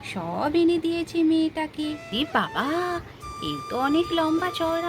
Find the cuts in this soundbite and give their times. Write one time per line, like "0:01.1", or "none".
0:02.1